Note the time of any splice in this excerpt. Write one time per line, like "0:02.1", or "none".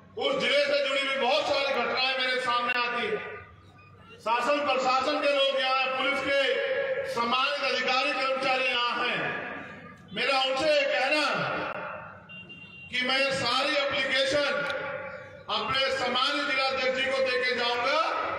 none